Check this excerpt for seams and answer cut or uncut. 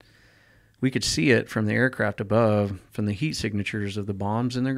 uncut